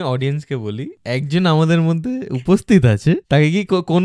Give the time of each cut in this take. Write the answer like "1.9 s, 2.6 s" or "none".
0.9 s, 3.2 s